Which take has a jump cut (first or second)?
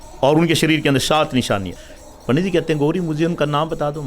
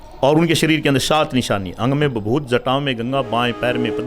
first